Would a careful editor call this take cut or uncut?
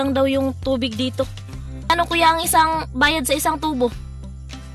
cut